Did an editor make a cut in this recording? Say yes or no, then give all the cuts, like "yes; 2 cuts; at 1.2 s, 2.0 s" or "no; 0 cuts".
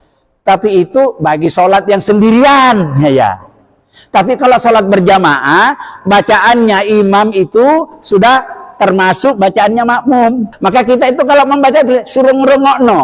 yes; 1 cut; at 10.5 s